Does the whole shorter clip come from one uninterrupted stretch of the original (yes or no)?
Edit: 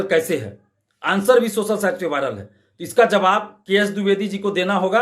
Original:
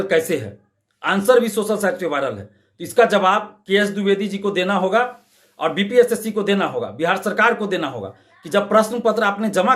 yes